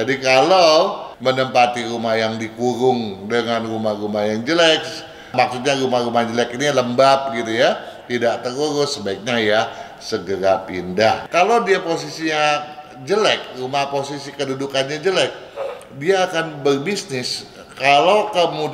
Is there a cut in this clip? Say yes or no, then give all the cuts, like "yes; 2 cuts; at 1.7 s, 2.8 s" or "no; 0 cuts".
yes; 2 cuts; at 1.0 s, 11.2 s